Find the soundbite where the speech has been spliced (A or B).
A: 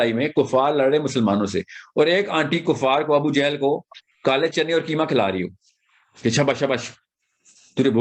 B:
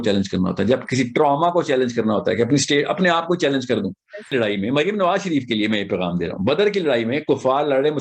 B